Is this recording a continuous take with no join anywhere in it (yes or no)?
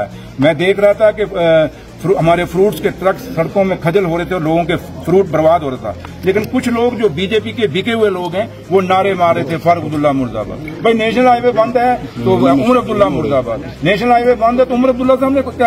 yes